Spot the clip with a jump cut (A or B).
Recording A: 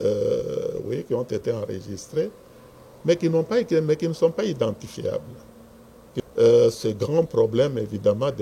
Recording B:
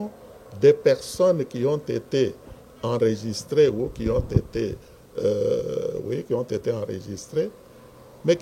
A